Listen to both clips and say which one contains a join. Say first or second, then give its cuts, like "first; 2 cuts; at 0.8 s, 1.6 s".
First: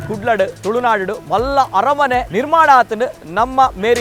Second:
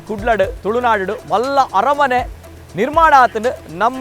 first; 1 cut; at 2.3 s